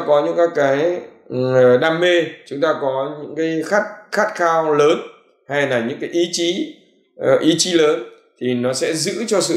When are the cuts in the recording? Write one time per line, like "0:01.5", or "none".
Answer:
none